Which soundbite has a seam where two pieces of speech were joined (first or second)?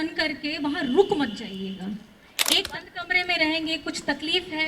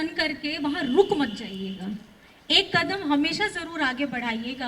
first